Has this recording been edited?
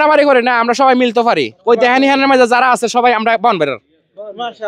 no; 0 cuts

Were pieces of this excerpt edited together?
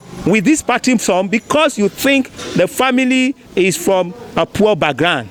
no; 0 cuts

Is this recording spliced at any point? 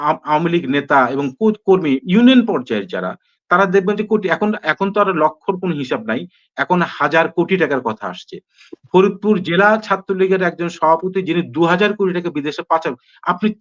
no; 0 cuts

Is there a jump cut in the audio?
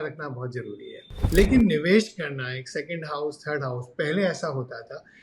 yes; 1 cut; at 1.1 s

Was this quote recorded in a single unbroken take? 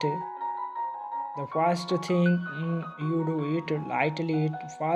yes; 0 cuts

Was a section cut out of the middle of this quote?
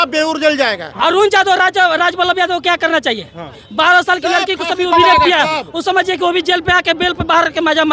yes; 2 cuts; at 1.0 s, 3.6 s

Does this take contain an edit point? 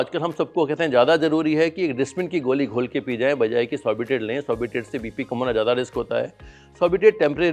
no; 0 cuts

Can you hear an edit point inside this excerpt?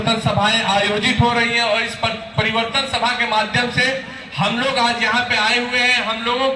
no; 0 cuts

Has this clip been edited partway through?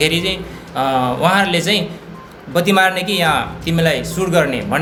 no; 0 cuts

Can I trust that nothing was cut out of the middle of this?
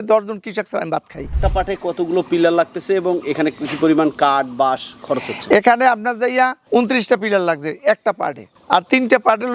no; 1 cut; at 1.2 s

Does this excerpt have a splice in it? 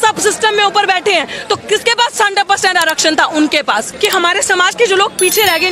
yes; 1 cut; at 3.9 s

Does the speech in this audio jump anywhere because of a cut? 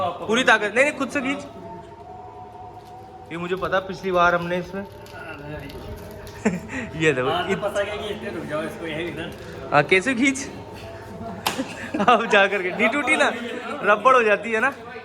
no; 0 cuts

